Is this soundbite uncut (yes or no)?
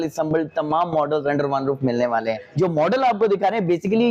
no